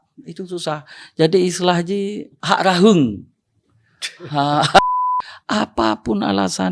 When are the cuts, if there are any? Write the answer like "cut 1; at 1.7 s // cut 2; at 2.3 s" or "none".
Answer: cut 1; at 2.3 s // cut 2; at 4.8 s